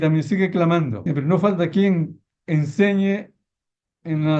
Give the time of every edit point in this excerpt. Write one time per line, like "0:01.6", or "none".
0:01.0